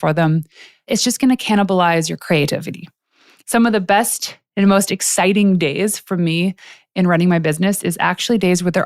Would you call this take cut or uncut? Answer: cut